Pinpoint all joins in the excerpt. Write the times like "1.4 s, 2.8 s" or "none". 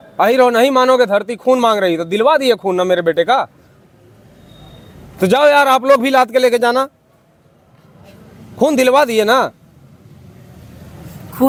none